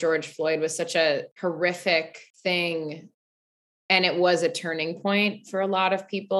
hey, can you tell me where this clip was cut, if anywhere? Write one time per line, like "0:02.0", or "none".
0:01.3
0:02.2